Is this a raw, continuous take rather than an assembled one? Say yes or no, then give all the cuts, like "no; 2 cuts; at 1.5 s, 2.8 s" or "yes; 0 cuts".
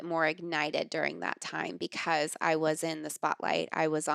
yes; 0 cuts